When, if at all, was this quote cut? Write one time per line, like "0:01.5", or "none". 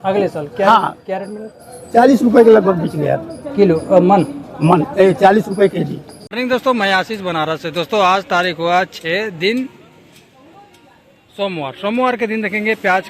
0:06.3